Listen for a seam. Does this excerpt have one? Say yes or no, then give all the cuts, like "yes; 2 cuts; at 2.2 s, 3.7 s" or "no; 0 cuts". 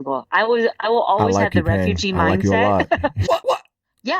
yes; 1 cut; at 3.2 s